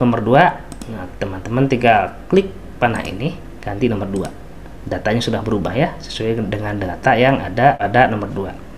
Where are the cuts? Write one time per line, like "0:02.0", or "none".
0:07.8